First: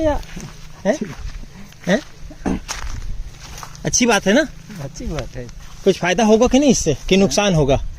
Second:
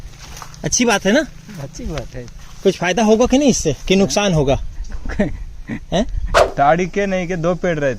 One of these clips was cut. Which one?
second; 1 cut; at 6.4 s

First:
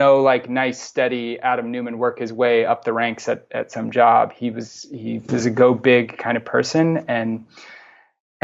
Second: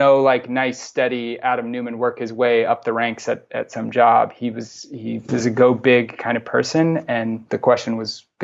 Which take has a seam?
second; 1 cut; at 7.4 s

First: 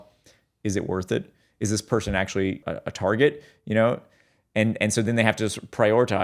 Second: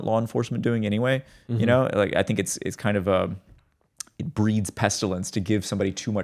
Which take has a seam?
first; 1 cut; at 2.6 s

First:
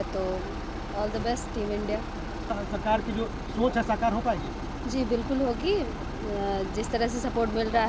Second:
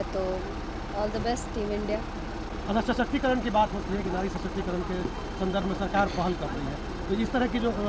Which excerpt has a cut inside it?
first; 1 cut; at 2.5 s

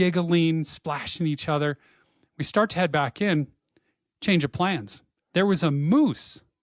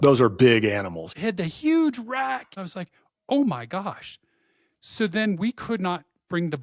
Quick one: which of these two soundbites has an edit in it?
second; 2 cuts; at 1.0 s, 2.5 s

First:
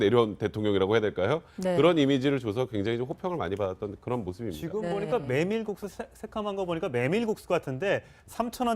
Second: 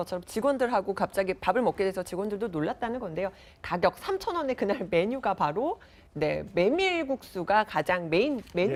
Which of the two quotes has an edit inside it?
first; 1 cut; at 1.6 s

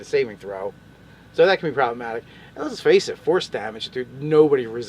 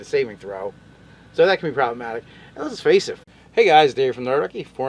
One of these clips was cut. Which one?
first; 1 cut; at 3.1 s

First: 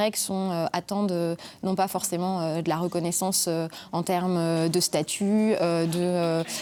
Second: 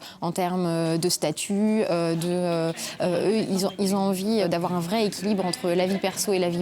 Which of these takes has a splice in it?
second; 1 cut; at 4.4 s

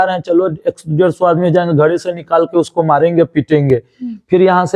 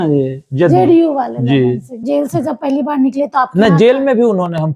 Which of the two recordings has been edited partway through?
second; 1 cut; at 2.0 s

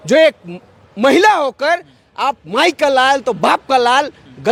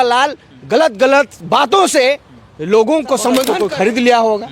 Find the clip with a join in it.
second; 1 cut; at 3.5 s

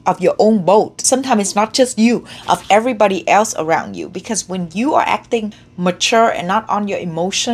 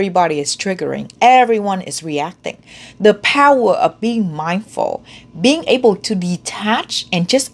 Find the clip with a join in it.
first; 2 cuts; at 1.0 s, 5.6 s

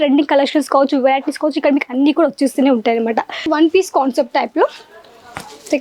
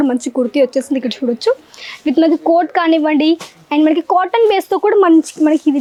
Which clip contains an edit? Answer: first; 1 cut; at 3.5 s

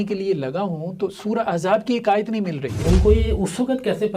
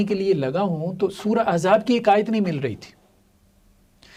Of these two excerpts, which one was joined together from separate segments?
first; 1 cut; at 2.7 s

